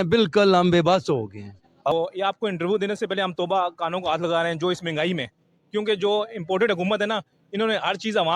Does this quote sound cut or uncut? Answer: cut